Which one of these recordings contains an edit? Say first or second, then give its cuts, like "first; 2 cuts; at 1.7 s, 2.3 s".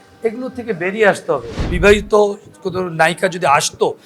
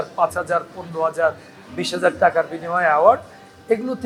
first; 1 cut; at 1.7 s